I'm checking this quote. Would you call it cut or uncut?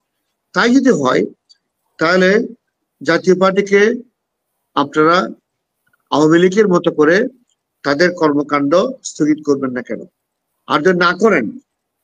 uncut